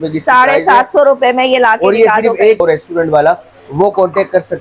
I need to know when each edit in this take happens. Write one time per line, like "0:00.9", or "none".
0:02.6